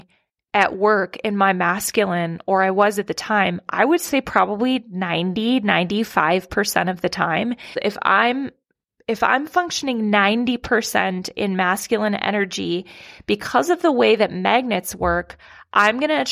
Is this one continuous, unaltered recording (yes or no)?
no